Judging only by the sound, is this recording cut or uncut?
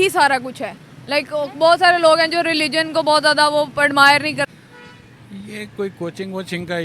cut